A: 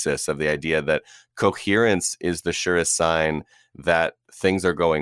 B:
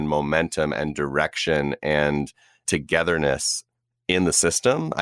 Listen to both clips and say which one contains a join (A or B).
B